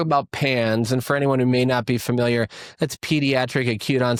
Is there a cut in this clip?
no; 0 cuts

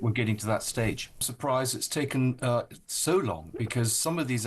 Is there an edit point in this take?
yes; 1 cut; at 1.3 s

